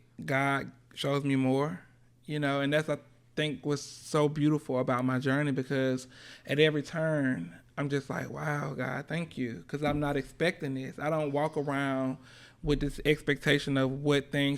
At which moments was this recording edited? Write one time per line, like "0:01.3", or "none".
none

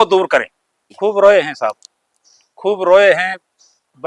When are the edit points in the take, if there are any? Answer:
0:01.0

